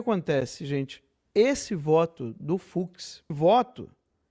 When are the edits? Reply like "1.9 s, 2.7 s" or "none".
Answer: 3.4 s